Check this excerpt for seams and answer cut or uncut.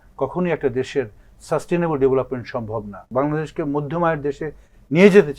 cut